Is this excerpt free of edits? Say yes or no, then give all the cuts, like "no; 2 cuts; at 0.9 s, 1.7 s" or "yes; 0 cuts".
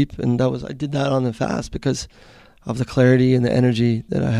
yes; 0 cuts